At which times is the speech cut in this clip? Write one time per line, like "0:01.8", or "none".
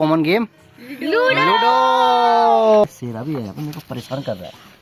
0:02.9